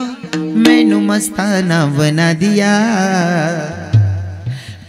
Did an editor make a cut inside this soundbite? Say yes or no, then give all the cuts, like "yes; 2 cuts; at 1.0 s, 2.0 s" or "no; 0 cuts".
no; 0 cuts